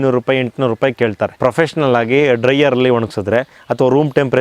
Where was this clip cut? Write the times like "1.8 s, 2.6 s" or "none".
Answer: 1.3 s